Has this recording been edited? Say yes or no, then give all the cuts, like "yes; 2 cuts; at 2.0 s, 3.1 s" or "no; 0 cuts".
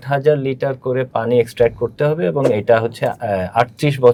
no; 0 cuts